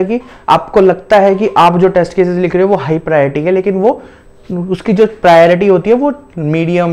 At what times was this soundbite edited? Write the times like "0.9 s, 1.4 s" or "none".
none